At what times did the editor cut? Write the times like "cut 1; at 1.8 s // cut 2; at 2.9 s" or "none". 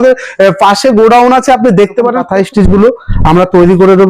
cut 1; at 2.2 s

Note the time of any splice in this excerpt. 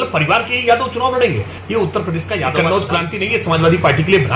cut 1; at 2.6 s

